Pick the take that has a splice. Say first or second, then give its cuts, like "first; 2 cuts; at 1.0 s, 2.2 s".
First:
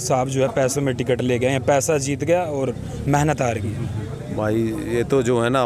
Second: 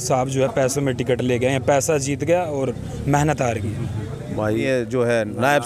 second; 1 cut; at 4.6 s